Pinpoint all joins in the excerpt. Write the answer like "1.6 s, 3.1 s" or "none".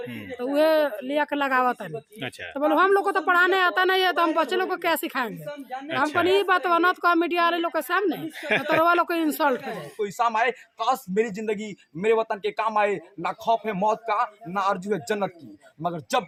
none